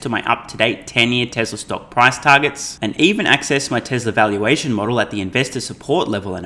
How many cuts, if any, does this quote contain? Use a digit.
0